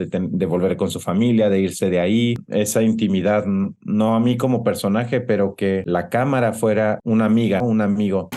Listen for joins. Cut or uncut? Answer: cut